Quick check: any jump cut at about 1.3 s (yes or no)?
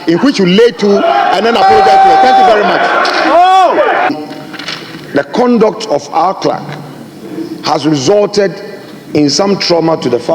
no